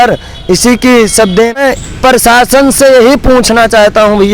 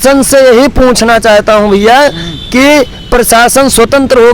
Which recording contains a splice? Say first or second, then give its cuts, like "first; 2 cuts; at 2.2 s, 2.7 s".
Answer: first; 1 cut; at 1.6 s